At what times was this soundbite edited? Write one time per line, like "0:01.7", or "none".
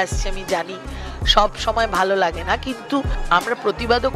0:03.2